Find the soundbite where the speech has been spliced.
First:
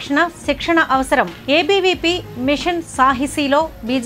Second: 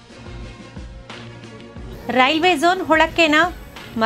second; 1 cut; at 1.0 s

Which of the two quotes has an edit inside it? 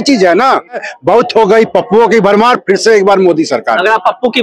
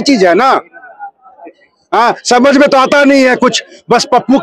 first; 1 cut; at 0.9 s

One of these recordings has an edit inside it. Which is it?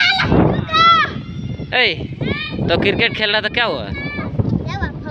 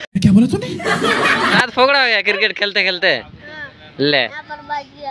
second; 1 cut; at 1.6 s

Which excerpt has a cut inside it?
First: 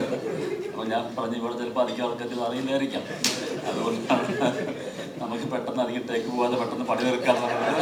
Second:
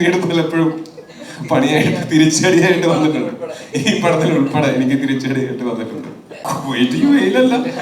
second; 1 cut; at 6.4 s

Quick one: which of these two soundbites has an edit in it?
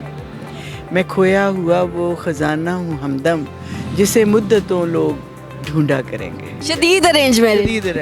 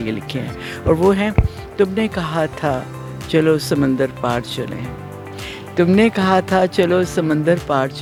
first; 1 cut; at 6.5 s

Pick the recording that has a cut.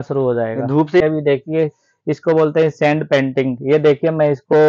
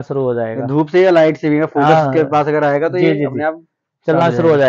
first; 1 cut; at 1.0 s

